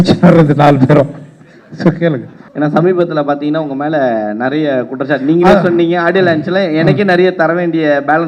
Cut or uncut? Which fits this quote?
cut